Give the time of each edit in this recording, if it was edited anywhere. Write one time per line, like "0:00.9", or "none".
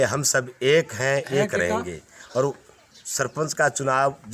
none